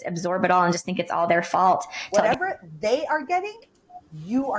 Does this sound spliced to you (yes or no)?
yes